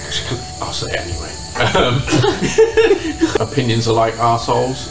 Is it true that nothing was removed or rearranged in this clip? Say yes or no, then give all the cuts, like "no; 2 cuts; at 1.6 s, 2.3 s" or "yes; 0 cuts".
yes; 0 cuts